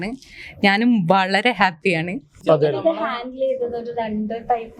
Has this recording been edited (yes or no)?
yes